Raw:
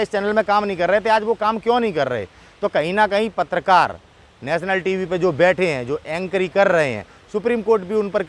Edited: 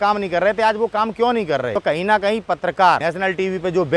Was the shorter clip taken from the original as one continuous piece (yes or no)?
no